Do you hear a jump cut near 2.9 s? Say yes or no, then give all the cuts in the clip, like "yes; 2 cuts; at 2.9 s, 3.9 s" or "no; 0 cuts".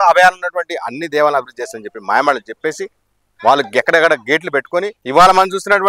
no; 1 cut; at 5.0 s